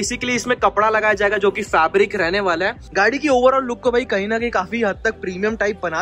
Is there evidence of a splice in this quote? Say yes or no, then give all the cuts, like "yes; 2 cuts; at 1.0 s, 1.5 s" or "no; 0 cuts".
yes; 1 cut; at 2.9 s